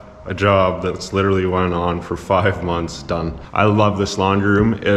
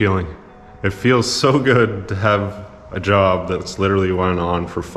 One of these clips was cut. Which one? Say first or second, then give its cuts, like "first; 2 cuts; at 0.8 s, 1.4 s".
first; 1 cut; at 3.4 s